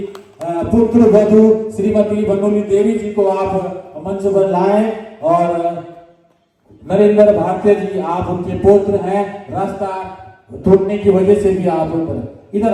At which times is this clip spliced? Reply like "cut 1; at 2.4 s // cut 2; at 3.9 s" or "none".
none